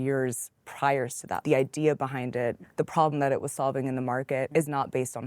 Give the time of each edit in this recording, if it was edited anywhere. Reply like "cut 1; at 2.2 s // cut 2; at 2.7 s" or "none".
cut 1; at 1.3 s // cut 2; at 2.6 s // cut 3; at 4.5 s

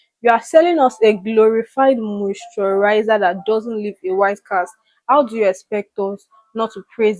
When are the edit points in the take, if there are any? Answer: none

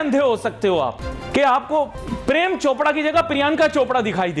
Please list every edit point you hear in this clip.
cut 1; at 1.1 s // cut 2; at 2.0 s

